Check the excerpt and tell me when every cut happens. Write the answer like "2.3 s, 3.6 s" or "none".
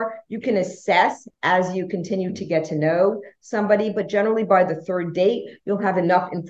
none